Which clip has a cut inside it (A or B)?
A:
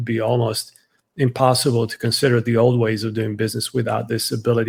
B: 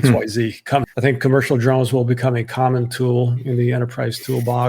B